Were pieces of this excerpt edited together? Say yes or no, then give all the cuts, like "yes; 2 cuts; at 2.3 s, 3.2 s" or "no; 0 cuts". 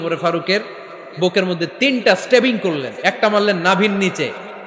no; 0 cuts